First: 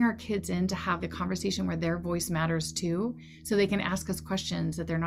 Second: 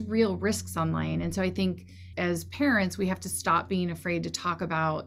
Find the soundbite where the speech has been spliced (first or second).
second